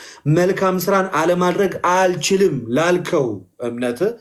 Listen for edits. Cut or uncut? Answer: uncut